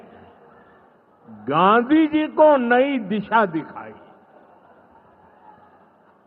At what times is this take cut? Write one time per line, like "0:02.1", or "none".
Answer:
none

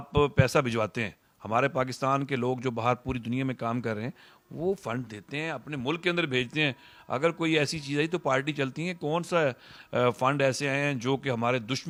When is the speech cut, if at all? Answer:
none

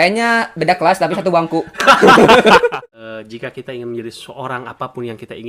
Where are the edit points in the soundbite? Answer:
0:02.7

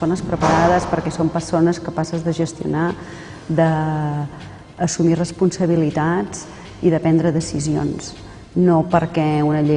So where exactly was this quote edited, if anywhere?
none

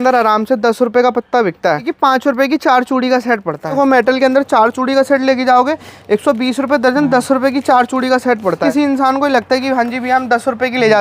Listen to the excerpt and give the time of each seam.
0:01.9
0:03.8
0:08.6

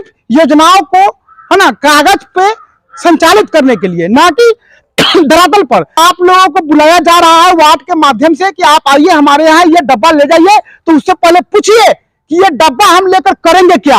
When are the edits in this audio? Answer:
0:06.0

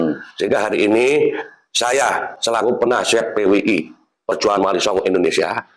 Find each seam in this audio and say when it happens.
none

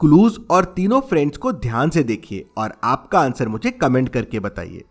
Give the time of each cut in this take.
none

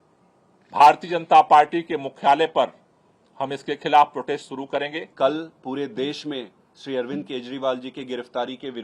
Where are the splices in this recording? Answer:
none

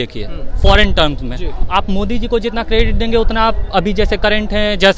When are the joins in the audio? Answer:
0:01.6

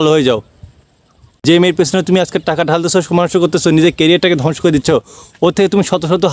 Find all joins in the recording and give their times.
0:01.4

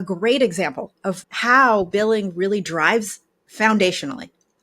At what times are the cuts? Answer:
0:01.2

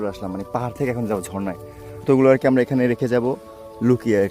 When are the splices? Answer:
0:02.0

